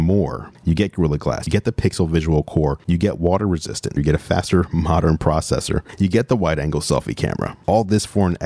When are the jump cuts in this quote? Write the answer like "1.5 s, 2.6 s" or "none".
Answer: 2.8 s